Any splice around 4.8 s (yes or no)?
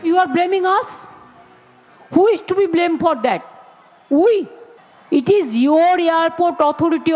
no